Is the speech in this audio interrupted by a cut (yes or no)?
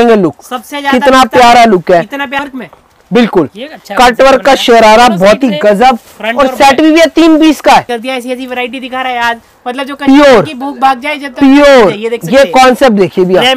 yes